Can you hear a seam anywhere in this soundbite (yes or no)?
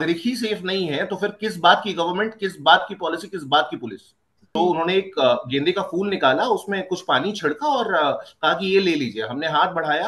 yes